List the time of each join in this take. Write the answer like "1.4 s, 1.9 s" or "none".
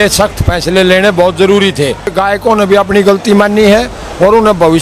2.1 s